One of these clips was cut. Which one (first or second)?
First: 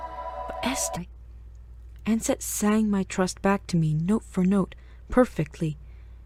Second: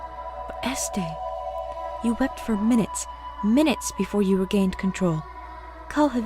second